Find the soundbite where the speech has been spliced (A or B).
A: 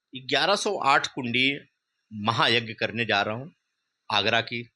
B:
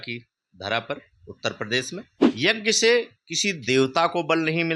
B